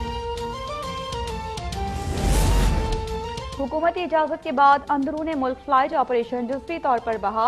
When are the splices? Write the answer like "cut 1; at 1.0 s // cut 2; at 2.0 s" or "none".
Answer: cut 1; at 1.9 s